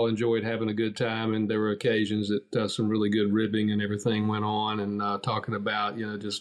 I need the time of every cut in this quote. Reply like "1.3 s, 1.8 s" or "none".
none

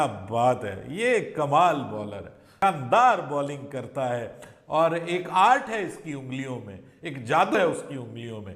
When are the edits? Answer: none

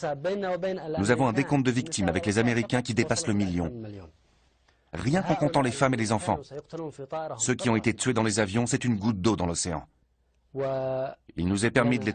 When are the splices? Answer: 7.6 s

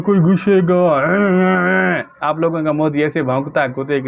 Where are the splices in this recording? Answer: none

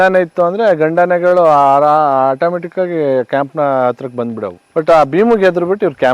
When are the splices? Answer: 4.6 s

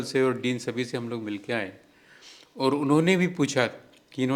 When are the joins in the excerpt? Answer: none

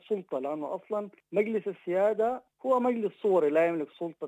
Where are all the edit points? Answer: 1.2 s, 2.5 s

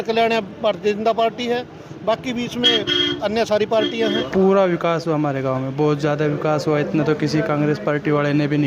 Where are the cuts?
4.2 s

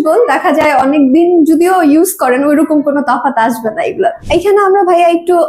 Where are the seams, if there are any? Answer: 4.2 s

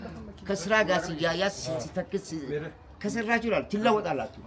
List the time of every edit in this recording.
none

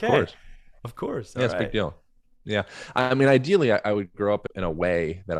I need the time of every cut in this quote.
4.4 s

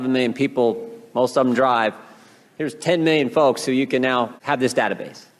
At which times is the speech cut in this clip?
4.3 s

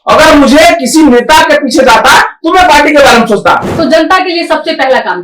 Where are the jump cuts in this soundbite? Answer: 3.7 s

